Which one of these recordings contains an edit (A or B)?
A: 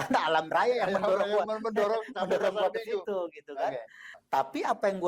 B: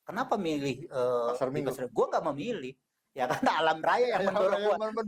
A